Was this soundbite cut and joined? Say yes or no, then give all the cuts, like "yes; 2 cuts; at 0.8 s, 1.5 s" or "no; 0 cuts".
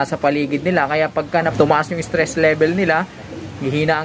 no; 0 cuts